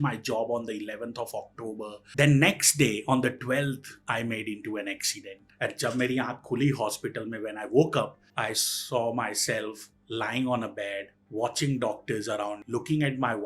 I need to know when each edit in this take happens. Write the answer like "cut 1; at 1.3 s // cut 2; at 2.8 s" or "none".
cut 1; at 2.1 s // cut 2; at 5.5 s